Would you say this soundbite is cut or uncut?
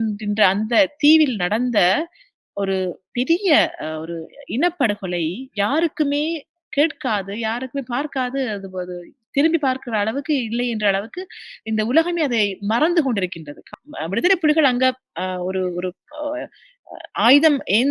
cut